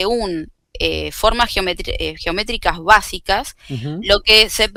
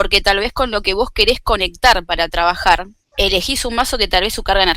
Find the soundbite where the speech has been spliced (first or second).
second